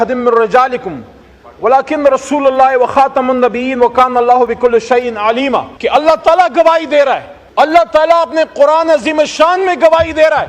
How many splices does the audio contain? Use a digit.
2